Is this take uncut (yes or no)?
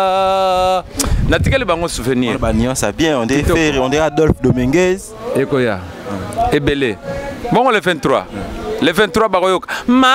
yes